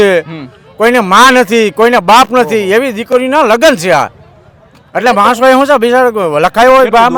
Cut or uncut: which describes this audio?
uncut